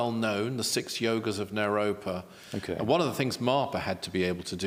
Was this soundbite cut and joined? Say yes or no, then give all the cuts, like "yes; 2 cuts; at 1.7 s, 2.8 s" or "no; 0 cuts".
no; 0 cuts